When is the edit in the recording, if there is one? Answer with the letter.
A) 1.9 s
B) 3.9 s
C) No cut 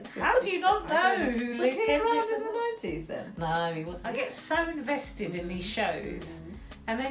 B